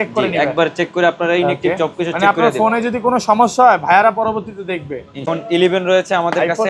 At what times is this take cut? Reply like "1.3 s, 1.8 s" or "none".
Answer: 5.2 s